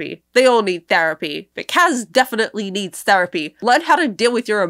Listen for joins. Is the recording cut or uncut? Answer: uncut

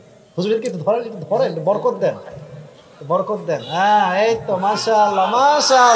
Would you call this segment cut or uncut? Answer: uncut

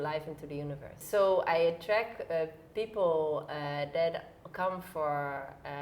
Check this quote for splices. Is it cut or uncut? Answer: cut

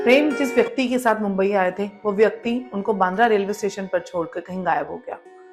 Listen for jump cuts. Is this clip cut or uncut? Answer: uncut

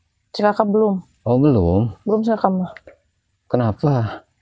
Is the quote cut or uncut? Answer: uncut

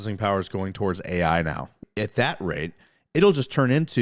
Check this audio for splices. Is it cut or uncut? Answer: cut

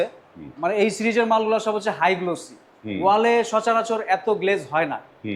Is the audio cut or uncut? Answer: uncut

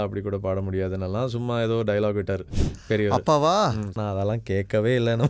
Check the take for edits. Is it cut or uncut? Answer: cut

